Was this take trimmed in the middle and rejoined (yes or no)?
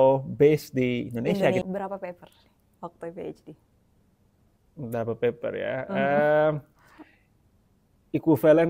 yes